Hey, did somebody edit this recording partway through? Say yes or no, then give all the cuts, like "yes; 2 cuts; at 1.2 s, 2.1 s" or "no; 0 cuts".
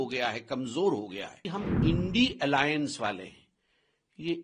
yes; 1 cut; at 1.4 s